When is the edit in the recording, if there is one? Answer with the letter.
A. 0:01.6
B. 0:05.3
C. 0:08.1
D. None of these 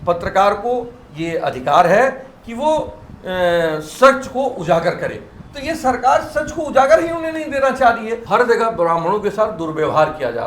C